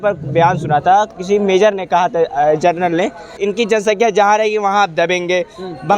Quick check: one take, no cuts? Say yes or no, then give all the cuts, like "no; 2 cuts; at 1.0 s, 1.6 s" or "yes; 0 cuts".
no; 1 cut; at 3.4 s